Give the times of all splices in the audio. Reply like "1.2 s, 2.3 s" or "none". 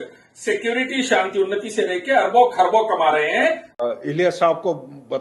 3.7 s